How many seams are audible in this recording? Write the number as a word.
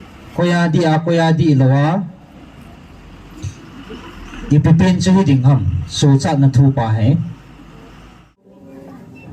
one